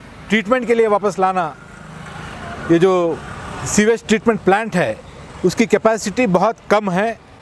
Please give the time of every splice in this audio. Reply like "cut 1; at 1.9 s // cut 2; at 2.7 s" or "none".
none